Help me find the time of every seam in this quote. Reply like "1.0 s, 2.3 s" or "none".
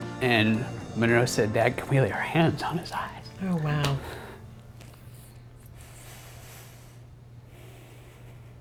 none